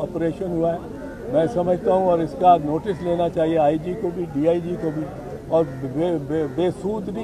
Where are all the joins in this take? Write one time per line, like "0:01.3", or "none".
none